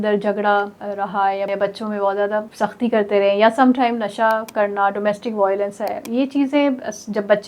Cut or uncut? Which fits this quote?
cut